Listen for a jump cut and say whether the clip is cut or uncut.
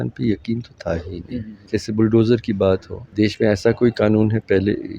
cut